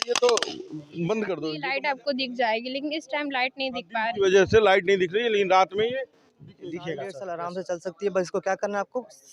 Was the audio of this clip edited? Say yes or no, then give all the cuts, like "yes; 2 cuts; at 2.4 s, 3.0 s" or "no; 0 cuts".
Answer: yes; 2 cuts; at 1.4 s, 7.2 s